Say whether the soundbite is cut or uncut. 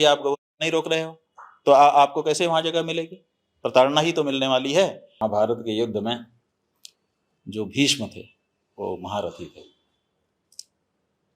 cut